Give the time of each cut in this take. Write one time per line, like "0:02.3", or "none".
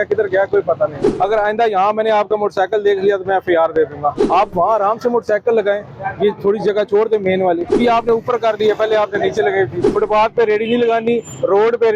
0:01.0
0:04.3
0:07.6
0:09.8